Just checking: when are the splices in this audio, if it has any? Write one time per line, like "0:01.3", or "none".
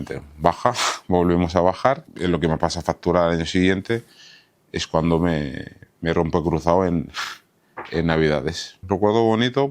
0:02.1
0:08.7